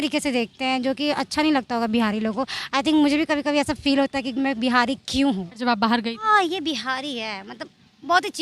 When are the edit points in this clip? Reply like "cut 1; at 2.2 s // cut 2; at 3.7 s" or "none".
cut 1; at 5.6 s